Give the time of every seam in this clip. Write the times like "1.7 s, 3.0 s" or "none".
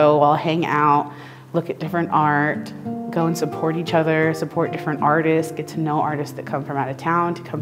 none